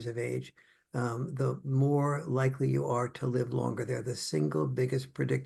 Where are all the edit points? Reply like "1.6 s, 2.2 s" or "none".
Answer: none